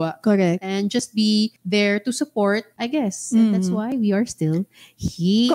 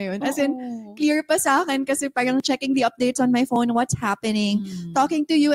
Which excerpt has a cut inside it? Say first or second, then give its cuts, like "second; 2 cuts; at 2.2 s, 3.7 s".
first; 2 cuts; at 1.6 s, 2.7 s